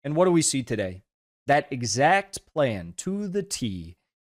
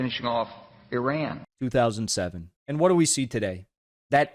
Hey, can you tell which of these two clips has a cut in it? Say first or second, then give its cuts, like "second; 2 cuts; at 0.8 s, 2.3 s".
second; 1 cut; at 1.4 s